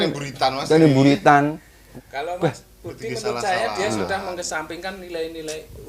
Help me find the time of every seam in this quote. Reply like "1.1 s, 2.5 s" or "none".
1.9 s